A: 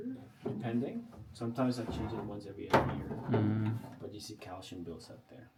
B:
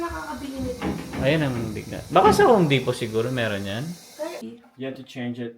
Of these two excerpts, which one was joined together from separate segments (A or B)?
B